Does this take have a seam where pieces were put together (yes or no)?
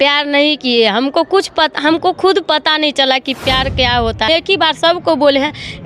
yes